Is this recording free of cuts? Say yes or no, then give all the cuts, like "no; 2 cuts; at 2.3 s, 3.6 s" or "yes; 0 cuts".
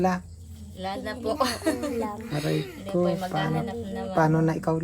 yes; 0 cuts